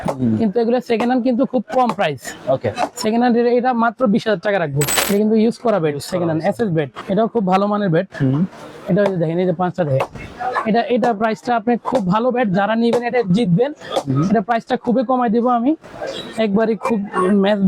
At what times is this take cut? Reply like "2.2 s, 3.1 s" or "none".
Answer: 4.9 s, 7.0 s